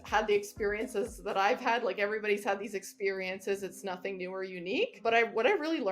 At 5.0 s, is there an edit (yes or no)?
yes